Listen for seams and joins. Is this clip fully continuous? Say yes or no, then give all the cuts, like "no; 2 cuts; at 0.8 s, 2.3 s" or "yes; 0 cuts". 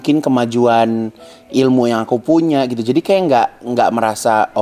yes; 0 cuts